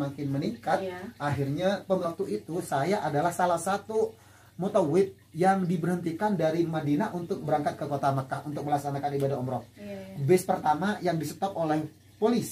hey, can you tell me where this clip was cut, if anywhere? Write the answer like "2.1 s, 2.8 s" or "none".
2.0 s